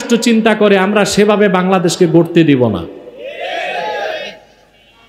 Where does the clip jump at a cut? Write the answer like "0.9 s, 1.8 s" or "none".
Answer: none